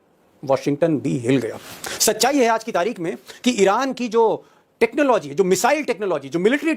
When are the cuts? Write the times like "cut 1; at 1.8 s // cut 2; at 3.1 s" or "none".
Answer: none